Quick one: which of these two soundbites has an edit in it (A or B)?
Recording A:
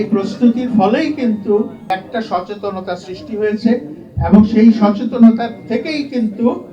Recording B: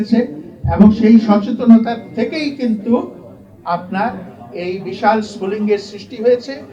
A